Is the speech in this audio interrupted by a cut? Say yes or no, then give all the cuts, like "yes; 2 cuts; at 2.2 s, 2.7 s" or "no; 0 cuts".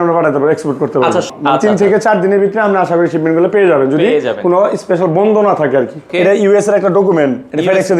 yes; 2 cuts; at 1.3 s, 6.0 s